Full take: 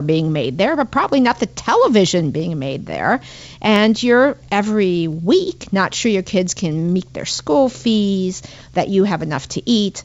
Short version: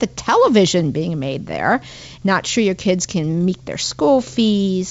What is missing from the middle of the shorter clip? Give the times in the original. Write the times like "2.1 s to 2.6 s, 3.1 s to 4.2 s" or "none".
3.5 s to 5.6 s